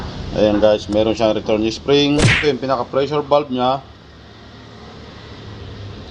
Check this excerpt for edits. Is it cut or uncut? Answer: cut